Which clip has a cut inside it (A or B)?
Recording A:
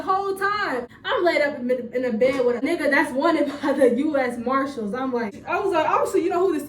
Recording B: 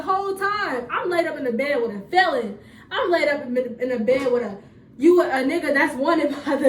A